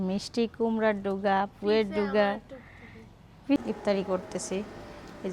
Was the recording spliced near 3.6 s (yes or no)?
yes